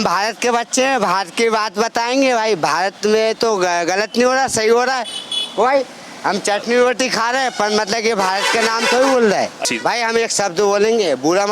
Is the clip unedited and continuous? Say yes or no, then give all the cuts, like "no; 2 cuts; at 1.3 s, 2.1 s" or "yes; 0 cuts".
no; 1 cut; at 9.6 s